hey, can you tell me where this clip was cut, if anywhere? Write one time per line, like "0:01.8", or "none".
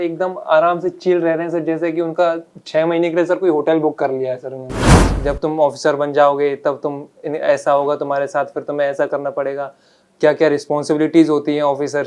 0:05.0